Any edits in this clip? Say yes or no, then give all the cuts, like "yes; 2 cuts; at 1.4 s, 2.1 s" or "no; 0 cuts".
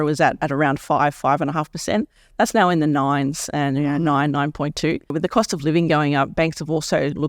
yes; 1 cut; at 5.1 s